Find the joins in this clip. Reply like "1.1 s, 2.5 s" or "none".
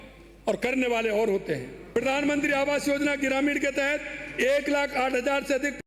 1.9 s